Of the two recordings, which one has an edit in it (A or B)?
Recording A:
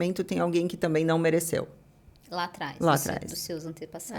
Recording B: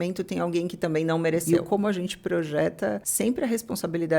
B